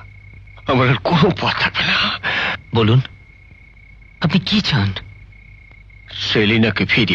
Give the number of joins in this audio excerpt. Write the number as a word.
zero